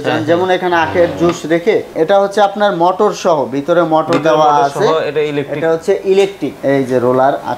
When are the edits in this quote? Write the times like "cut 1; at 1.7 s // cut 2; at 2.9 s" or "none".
cut 1; at 1.9 s // cut 2; at 6.5 s